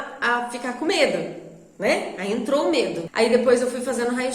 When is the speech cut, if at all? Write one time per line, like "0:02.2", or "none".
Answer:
0:03.0